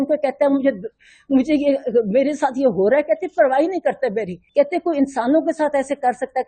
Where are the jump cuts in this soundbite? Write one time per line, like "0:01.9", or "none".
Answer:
0:04.4